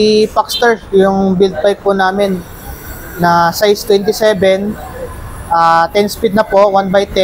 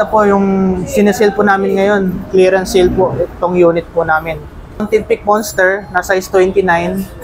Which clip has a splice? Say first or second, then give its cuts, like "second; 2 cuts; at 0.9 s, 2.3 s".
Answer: second; 1 cut; at 4.9 s